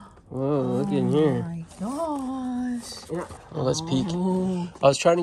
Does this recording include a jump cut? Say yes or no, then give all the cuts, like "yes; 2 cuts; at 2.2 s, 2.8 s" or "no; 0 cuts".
yes; 1 cut; at 3.5 s